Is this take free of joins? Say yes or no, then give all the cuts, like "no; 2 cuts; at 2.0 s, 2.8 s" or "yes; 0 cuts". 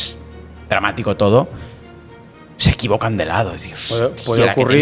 yes; 0 cuts